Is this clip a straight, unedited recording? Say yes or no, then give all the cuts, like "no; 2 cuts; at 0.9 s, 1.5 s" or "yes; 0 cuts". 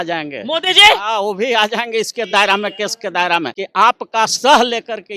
no; 1 cut; at 3.6 s